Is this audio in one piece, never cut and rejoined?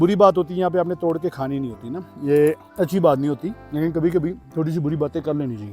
no; 3 cuts; at 2.7 s, 3.6 s, 4.4 s

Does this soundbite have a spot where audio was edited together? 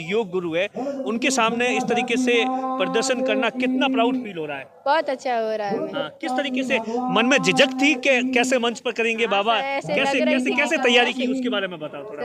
no; 0 cuts

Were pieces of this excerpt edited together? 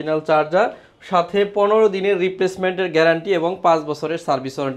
no; 0 cuts

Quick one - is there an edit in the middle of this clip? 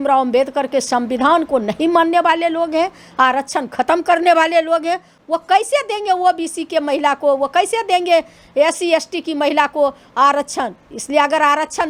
no; 0 cuts

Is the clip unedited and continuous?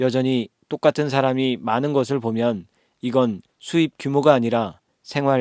no; 1 cut; at 3.5 s

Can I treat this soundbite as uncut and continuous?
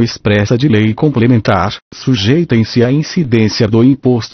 yes; 0 cuts

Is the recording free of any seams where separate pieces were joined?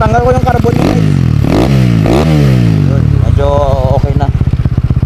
yes; 0 cuts

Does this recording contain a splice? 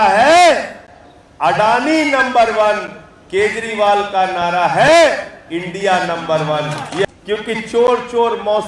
yes; 1 cut; at 7.0 s

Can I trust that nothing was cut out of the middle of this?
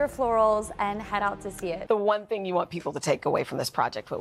no; 1 cut; at 1.8 s

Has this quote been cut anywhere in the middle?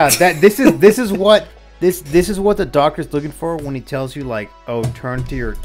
no; 0 cuts

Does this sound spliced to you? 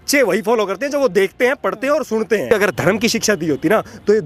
yes; 1 cut; at 2.5 s

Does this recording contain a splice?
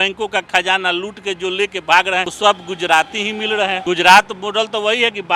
yes; 2 cuts; at 2.3 s, 3.8 s

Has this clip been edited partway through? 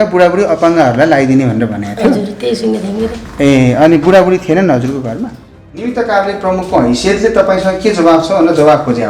yes; 1 cut; at 5.9 s

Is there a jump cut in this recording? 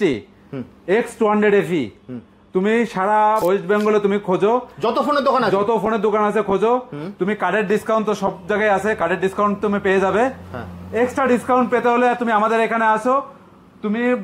yes; 1 cut; at 3.4 s

